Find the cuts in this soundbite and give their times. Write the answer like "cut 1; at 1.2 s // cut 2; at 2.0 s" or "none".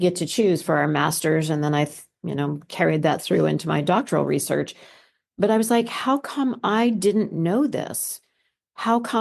none